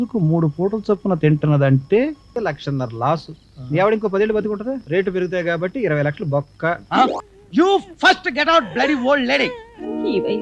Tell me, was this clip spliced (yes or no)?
yes